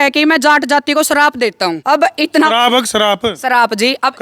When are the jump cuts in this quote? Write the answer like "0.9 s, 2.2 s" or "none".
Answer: 1.8 s